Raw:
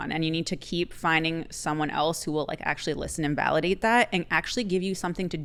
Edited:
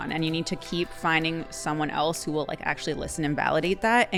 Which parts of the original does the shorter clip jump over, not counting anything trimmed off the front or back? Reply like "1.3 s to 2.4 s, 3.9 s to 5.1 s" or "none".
none